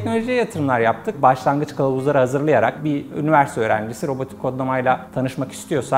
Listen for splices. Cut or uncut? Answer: cut